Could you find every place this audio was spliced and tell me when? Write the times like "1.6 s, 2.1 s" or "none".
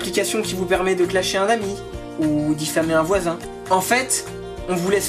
3.5 s